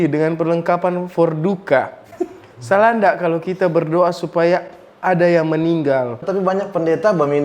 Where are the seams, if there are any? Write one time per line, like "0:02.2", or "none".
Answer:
0:06.2